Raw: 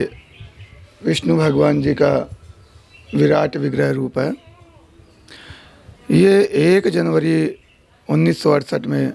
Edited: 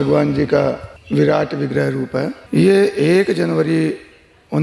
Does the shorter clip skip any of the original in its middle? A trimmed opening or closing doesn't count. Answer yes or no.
yes